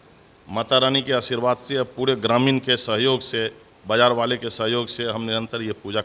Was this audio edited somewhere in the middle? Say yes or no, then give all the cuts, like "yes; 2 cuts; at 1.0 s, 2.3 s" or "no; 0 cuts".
no; 0 cuts